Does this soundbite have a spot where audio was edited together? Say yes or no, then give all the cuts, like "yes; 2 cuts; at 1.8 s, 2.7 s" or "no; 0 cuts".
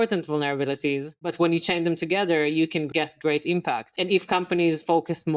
yes; 3 cuts; at 1.2 s, 2.9 s, 3.9 s